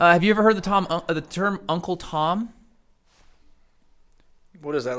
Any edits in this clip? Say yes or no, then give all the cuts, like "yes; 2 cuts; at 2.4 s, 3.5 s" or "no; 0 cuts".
no; 0 cuts